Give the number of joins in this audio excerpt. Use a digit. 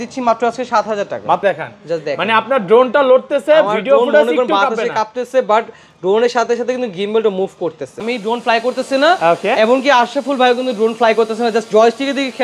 2